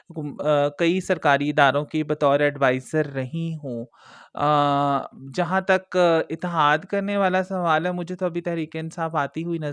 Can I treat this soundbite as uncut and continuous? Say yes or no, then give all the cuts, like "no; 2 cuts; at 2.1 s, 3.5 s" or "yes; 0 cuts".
yes; 0 cuts